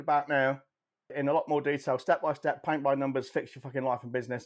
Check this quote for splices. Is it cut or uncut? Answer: cut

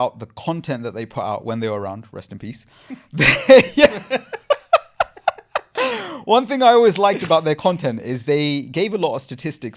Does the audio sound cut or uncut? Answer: uncut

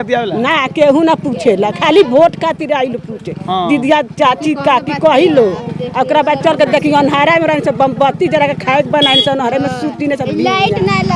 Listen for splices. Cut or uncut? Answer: uncut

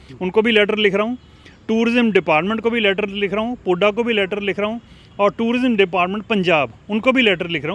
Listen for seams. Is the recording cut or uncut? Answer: uncut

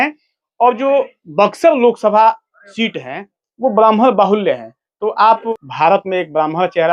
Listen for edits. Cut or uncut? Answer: cut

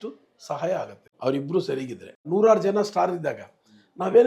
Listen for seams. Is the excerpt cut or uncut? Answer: cut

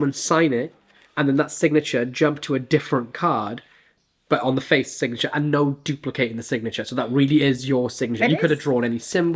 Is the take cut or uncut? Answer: uncut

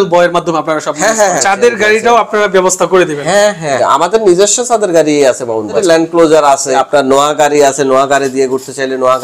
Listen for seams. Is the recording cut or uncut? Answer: cut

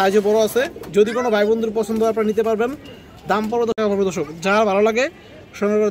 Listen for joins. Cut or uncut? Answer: cut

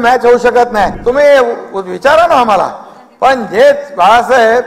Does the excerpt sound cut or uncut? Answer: cut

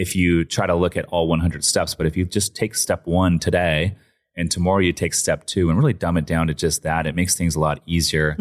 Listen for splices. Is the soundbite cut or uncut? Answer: uncut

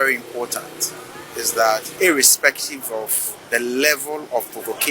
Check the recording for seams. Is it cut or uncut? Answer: cut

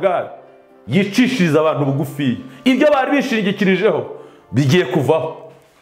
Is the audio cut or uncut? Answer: uncut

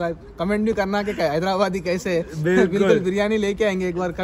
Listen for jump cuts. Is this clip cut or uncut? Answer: uncut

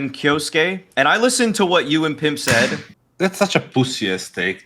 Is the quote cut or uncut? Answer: cut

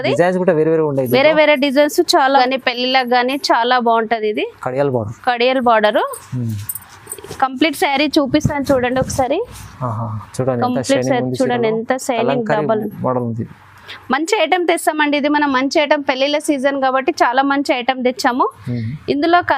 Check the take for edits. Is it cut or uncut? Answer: cut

